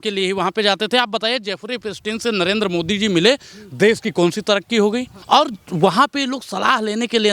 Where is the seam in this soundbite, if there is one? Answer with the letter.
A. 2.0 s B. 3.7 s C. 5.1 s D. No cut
C